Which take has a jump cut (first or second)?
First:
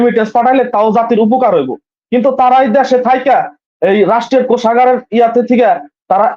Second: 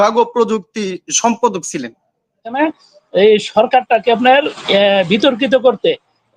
second